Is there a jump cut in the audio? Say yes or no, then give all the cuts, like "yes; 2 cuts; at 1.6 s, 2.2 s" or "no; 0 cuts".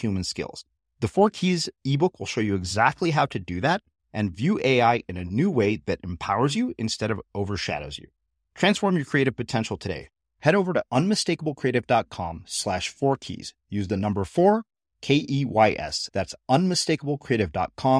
no; 0 cuts